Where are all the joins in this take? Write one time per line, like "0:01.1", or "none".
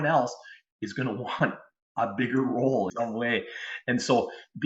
0:02.8